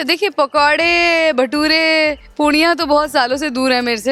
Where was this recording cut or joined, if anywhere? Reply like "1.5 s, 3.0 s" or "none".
none